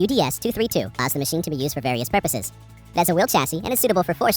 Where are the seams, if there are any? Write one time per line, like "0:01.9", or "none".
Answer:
0:01.0